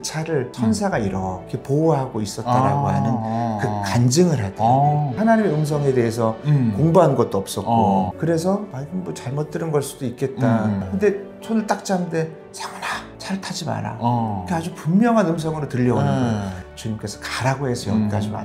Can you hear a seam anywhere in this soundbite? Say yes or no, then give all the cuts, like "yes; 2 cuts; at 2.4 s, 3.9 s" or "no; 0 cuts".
yes; 2 cuts; at 5.1 s, 16.6 s